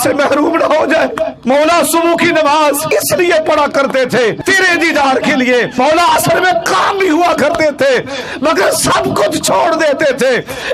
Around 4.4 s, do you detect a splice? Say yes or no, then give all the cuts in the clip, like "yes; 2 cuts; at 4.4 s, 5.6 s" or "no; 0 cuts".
yes; 4 cuts; at 1.3 s, 2.8 s, 4.4 s, 5.7 s